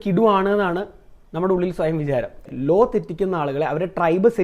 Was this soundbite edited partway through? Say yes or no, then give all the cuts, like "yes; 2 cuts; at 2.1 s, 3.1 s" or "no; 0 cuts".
yes; 1 cut; at 2.5 s